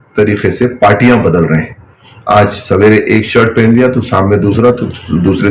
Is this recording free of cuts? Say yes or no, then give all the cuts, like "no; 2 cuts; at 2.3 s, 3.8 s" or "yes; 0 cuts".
yes; 0 cuts